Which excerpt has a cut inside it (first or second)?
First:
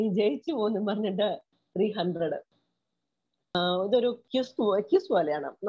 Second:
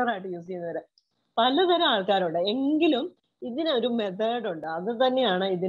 first